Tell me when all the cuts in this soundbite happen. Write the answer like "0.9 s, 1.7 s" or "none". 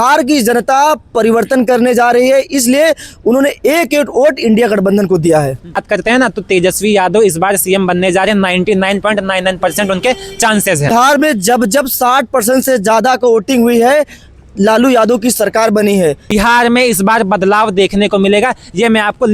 5.8 s, 10.9 s, 16.2 s